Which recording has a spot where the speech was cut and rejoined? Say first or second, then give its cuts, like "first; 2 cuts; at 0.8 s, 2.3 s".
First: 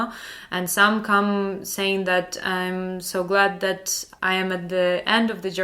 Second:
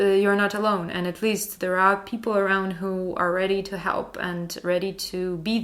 first; 1 cut; at 4.0 s